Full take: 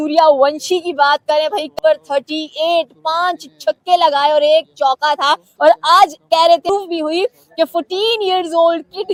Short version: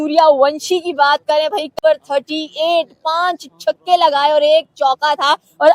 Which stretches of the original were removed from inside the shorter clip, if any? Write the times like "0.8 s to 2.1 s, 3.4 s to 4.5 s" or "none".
none